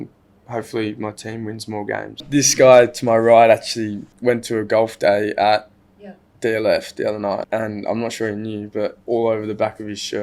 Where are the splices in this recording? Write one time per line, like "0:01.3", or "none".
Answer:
0:02.2
0:04.0
0:07.5
0:09.0